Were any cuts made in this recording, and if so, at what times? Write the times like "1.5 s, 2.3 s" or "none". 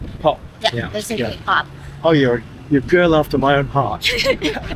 none